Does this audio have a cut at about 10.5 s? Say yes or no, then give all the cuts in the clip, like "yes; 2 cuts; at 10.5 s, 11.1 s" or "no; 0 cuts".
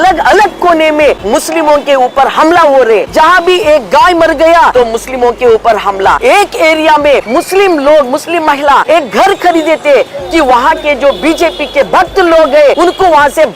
no; 7 cuts; at 1.2 s, 3.1 s, 4.7 s, 6.2 s, 7.3 s, 8.8 s, 12.8 s